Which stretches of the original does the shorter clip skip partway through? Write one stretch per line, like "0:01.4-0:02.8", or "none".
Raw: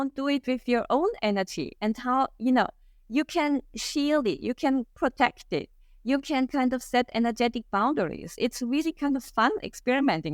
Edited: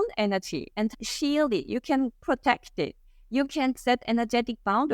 0:02.0-0:03.7
0:06.5-0:06.8